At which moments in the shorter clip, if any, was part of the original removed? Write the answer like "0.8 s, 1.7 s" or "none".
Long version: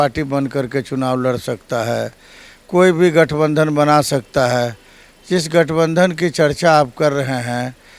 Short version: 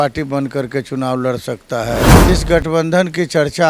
2.1 s